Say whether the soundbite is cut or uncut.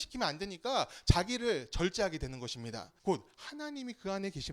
cut